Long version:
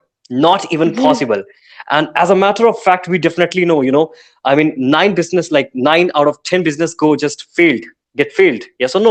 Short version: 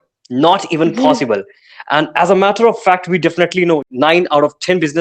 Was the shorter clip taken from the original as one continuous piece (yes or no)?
no